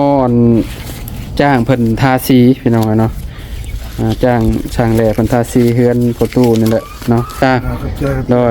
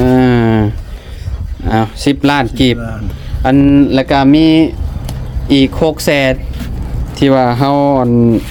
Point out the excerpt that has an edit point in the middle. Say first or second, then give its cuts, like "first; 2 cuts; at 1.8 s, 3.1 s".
first; 1 cut; at 7.3 s